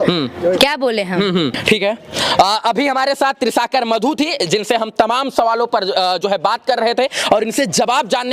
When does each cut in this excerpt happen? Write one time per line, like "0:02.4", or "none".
none